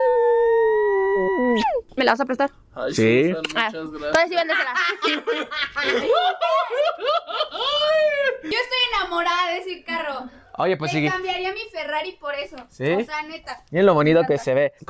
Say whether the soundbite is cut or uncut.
cut